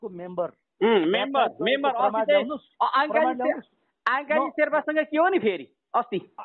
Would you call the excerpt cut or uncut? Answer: uncut